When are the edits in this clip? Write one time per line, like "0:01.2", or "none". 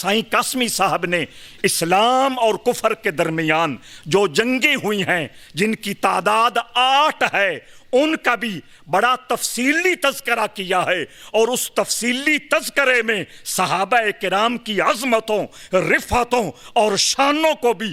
none